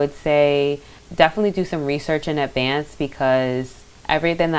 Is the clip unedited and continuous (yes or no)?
no